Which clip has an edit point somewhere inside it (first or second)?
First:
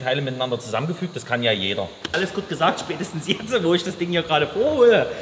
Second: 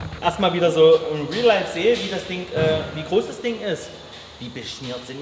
first